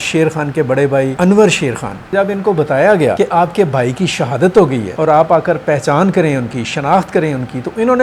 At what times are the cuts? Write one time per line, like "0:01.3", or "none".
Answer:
0:01.1
0:02.1
0:03.1
0:04.9